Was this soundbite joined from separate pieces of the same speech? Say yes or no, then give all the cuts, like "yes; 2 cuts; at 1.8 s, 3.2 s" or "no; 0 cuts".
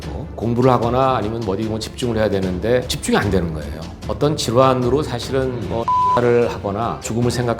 yes; 1 cut; at 4.1 s